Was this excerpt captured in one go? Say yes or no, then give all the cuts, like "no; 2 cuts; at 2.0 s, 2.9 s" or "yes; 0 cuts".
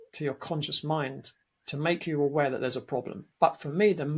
no; 1 cut; at 3.2 s